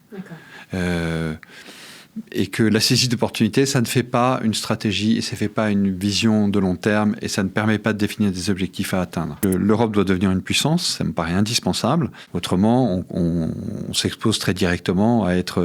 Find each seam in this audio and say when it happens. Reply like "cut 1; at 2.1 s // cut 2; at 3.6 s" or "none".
cut 1; at 9.4 s // cut 2; at 12.3 s